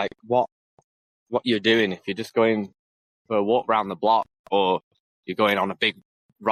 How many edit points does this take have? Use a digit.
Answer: 0